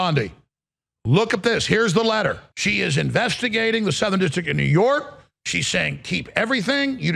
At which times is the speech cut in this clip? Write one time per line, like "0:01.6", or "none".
0:02.5